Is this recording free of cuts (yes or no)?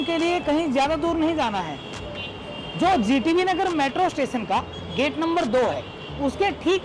yes